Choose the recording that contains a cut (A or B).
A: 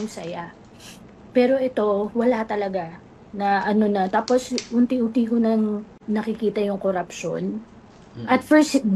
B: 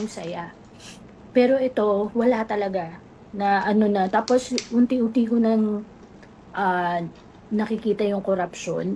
A